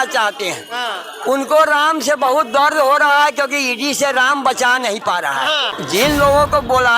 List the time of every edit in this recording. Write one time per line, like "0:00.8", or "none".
0:06.0